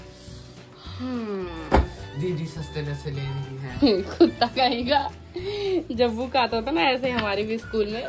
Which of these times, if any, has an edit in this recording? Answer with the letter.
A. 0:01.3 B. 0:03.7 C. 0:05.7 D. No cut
D